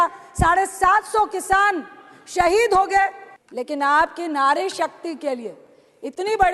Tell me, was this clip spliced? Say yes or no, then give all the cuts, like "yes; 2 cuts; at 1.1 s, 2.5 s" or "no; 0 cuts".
yes; 1 cut; at 3.3 s